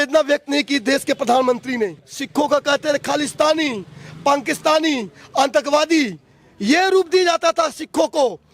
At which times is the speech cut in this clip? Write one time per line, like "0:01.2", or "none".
0:02.1